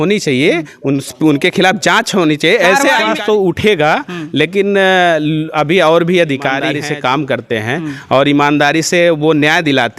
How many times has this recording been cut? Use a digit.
2